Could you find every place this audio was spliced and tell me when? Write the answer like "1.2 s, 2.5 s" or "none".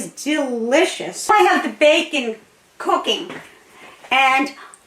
1.3 s